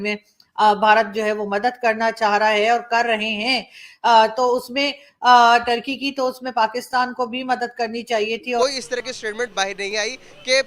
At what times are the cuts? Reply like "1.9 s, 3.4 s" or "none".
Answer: 8.6 s